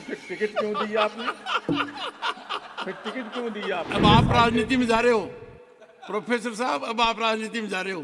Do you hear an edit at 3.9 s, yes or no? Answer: yes